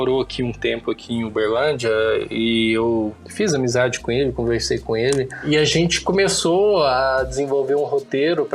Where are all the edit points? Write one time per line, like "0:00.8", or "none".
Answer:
none